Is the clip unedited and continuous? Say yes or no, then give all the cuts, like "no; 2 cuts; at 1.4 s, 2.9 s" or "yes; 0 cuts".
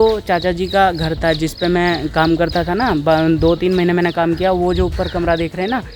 yes; 0 cuts